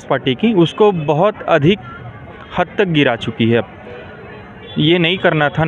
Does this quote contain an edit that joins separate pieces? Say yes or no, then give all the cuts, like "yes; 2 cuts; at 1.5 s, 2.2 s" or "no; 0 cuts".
no; 0 cuts